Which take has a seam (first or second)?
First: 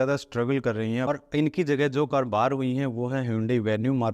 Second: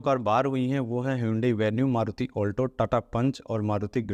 first